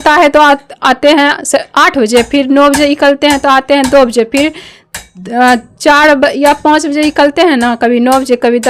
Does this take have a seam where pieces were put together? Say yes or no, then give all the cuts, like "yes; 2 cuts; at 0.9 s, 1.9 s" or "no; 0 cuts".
no; 0 cuts